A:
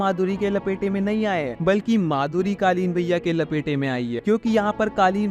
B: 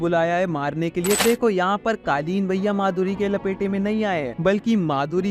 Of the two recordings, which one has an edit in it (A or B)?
B